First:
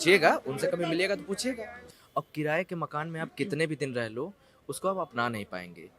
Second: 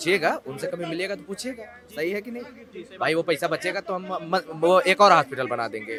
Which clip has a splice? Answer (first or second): first